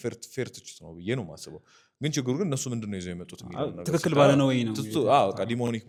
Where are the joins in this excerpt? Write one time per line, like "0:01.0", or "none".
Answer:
none